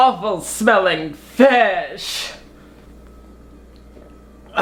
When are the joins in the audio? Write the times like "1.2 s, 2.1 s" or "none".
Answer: none